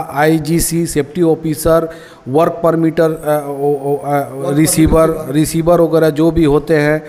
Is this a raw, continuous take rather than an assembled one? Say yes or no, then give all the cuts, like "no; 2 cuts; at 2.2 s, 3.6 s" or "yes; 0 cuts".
yes; 0 cuts